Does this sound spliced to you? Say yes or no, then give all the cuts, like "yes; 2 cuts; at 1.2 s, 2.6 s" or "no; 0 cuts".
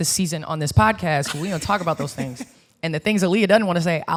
no; 0 cuts